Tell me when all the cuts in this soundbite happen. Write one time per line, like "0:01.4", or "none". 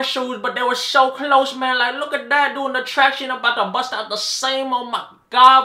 none